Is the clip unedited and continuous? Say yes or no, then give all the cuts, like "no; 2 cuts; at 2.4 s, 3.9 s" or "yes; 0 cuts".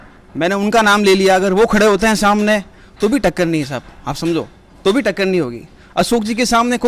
yes; 0 cuts